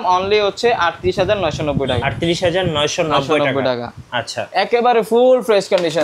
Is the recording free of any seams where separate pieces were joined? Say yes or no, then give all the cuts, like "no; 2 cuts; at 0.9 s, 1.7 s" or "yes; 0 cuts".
yes; 0 cuts